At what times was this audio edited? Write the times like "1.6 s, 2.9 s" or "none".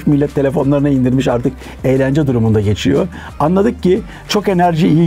none